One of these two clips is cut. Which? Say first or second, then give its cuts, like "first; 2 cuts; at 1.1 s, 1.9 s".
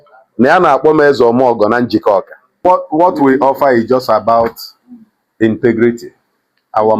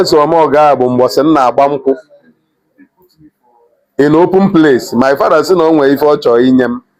first; 1 cut; at 2.7 s